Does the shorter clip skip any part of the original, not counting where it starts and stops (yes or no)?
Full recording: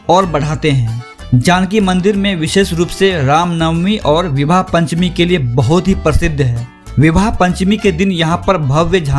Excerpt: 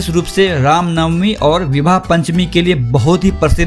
no